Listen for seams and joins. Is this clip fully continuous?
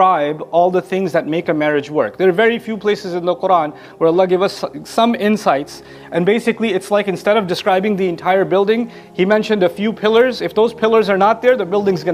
yes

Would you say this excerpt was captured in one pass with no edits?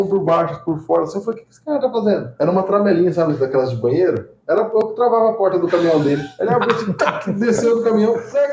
yes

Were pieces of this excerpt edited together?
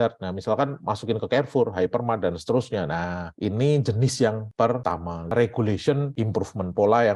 yes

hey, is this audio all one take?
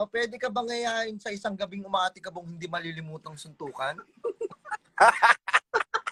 yes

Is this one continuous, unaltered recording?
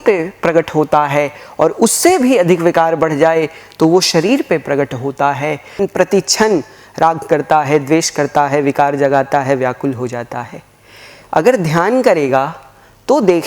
no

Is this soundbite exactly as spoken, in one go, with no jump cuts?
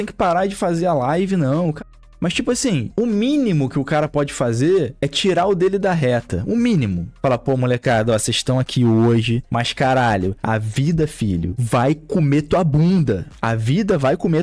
yes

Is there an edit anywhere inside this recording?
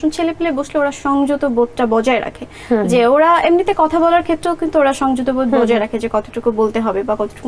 no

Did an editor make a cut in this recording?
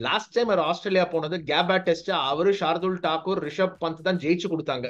no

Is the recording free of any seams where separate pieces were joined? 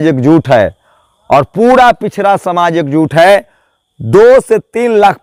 yes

